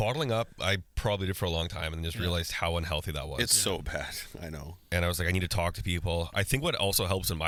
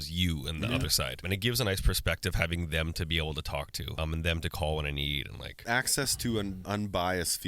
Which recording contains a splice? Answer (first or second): second